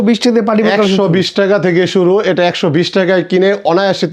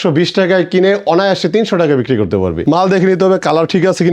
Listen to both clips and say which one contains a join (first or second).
second